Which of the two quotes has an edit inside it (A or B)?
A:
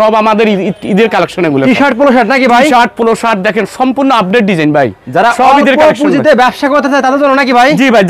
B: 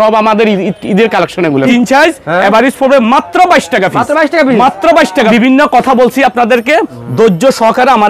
B